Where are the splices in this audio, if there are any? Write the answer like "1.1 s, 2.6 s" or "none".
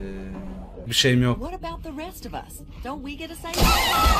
0.9 s